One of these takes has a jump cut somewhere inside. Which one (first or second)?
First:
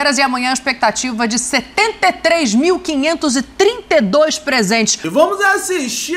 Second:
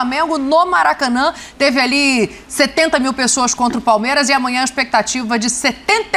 first